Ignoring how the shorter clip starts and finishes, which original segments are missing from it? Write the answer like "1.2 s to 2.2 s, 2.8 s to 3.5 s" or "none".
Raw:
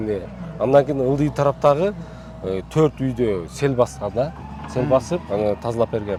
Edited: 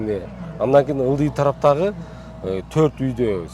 none